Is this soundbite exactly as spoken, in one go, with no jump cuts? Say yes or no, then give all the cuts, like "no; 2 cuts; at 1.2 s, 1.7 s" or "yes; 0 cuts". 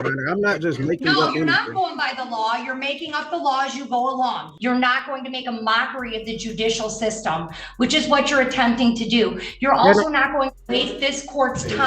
no; 1 cut; at 4.5 s